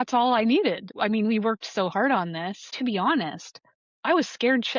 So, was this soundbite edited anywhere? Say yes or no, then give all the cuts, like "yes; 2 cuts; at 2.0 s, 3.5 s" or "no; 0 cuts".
yes; 2 cuts; at 0.9 s, 2.7 s